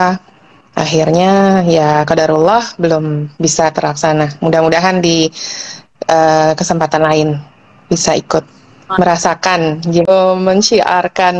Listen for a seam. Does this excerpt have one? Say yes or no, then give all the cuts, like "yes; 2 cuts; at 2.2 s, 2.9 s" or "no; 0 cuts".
yes; 1 cut; at 10.1 s